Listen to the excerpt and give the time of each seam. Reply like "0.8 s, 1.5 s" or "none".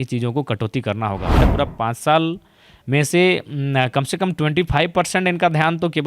1.4 s